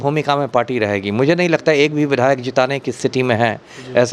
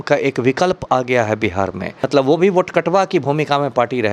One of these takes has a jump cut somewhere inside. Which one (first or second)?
second